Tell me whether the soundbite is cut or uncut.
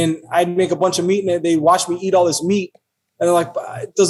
uncut